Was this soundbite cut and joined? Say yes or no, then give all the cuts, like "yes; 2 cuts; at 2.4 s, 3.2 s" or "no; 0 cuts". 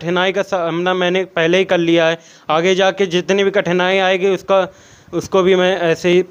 no; 0 cuts